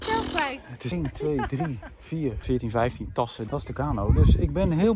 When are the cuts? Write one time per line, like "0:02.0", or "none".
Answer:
0:00.9
0:02.4
0:03.4